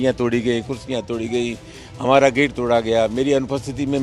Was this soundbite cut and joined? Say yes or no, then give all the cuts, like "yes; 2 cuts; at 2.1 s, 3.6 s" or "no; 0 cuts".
no; 0 cuts